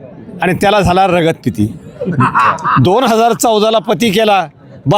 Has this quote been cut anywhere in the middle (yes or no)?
no